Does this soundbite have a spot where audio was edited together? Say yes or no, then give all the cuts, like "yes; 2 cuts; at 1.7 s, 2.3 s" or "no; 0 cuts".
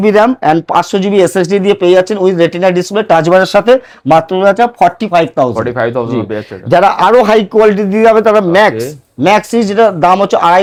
no; 0 cuts